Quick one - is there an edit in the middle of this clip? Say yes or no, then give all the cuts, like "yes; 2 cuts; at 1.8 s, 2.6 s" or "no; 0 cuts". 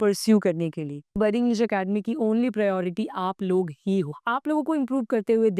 yes; 2 cuts; at 1.1 s, 4.2 s